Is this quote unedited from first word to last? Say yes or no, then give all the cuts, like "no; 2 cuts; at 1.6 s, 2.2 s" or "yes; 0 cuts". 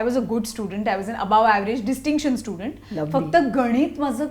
yes; 0 cuts